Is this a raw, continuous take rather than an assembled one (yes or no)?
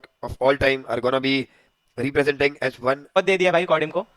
no